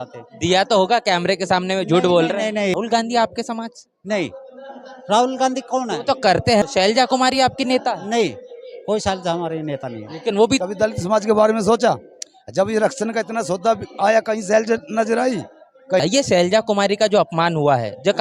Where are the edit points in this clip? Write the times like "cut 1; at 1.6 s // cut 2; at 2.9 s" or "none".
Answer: cut 1; at 2.7 s // cut 2; at 6.6 s // cut 3; at 10.6 s // cut 4; at 16.0 s